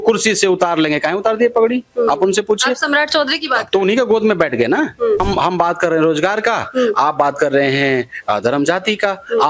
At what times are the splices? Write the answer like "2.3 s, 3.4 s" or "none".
5.2 s